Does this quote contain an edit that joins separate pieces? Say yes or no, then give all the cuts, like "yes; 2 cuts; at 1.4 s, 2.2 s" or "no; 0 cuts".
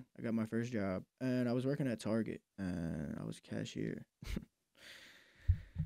yes; 3 cuts; at 1.1 s, 2.5 s, 4.1 s